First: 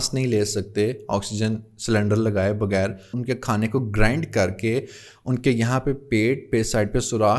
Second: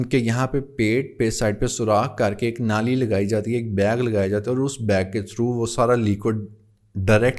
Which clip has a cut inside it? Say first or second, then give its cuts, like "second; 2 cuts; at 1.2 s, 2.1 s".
first; 1 cut; at 3.1 s